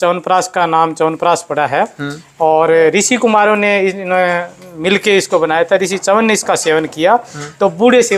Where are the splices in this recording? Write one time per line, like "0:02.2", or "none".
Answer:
none